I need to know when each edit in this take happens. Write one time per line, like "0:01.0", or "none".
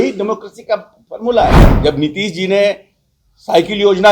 0:01.7